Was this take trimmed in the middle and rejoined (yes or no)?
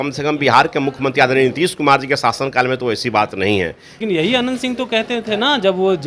yes